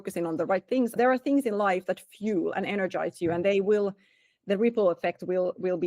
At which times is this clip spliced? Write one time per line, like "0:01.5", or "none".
0:00.9